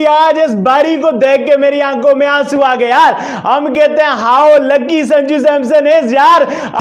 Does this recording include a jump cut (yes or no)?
no